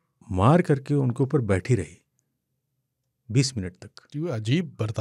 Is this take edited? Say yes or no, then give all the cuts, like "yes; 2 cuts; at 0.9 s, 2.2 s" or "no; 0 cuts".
no; 0 cuts